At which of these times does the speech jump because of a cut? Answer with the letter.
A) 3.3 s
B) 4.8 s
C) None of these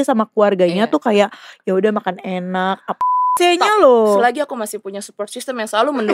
A